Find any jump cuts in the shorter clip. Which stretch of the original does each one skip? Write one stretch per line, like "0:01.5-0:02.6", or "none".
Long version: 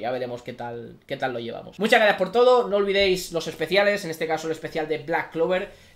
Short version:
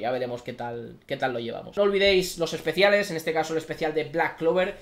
0:01.7-0:02.7